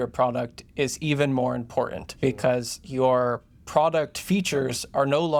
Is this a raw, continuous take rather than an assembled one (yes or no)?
yes